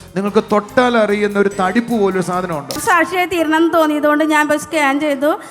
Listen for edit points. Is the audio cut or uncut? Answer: cut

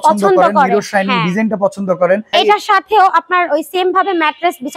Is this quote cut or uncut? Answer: cut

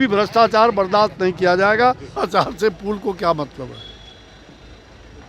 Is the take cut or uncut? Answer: cut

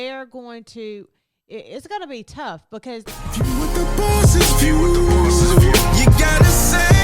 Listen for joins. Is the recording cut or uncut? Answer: cut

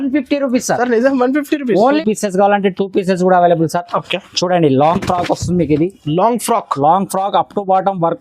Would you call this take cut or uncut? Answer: cut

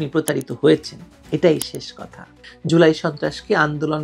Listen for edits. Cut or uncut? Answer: cut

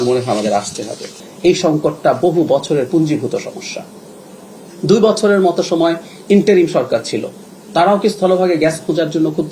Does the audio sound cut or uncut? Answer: cut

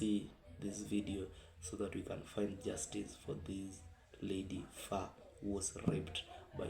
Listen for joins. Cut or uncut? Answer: uncut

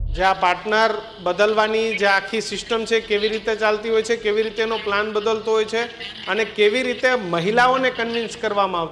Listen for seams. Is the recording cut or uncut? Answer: uncut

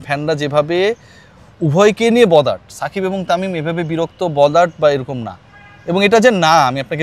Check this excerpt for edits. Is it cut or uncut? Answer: uncut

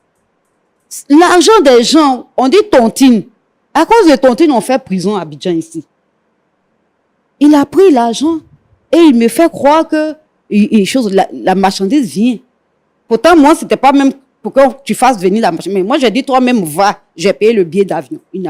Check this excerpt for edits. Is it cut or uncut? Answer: uncut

